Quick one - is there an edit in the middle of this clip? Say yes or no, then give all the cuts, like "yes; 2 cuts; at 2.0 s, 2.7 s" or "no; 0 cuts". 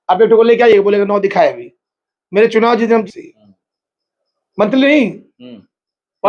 yes; 1 cut; at 3.1 s